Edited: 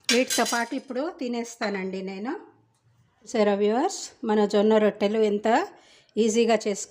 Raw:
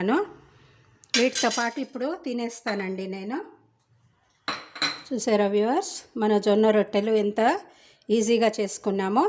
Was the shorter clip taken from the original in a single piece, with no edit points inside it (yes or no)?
no